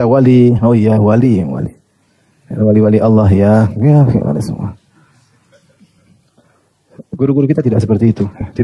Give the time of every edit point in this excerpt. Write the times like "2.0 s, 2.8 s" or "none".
none